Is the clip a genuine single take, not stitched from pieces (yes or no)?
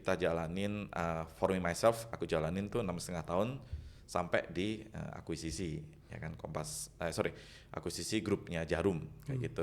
yes